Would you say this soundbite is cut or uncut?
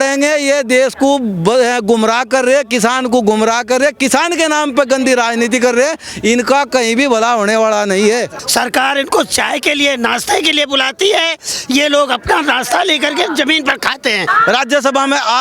cut